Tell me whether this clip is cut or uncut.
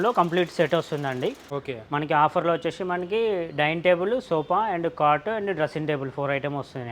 cut